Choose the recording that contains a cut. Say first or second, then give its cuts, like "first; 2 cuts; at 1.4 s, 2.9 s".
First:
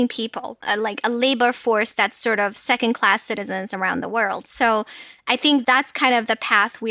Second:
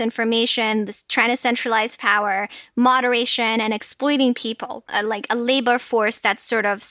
first; 1 cut; at 5.6 s